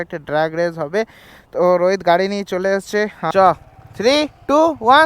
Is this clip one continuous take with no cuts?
no; 1 cut; at 3.3 s

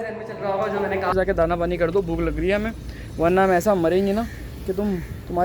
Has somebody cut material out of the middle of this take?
yes; 1 cut; at 1.1 s

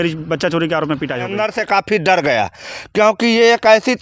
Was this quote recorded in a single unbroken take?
no; 1 cut; at 1.3 s

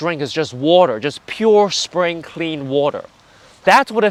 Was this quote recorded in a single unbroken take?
yes; 0 cuts

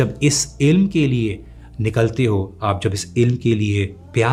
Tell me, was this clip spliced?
no; 0 cuts

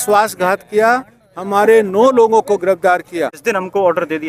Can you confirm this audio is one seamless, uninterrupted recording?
no; 1 cut; at 3.4 s

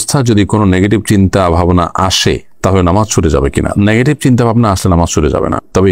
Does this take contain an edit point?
no; 0 cuts

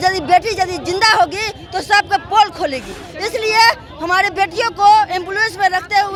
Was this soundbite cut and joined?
no; 0 cuts

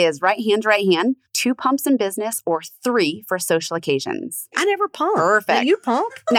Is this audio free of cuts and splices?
no; 2 cuts; at 1.3 s, 4.6 s

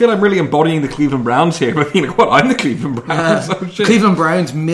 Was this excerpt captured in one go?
yes; 0 cuts

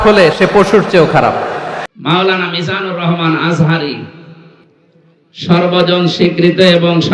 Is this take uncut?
no; 1 cut; at 1.8 s

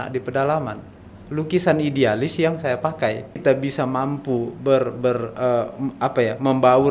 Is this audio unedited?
no; 1 cut; at 3.4 s

